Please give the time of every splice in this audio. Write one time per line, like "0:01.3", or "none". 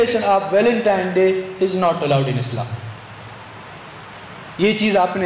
none